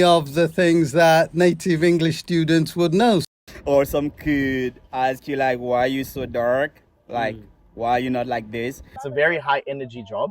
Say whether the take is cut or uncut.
cut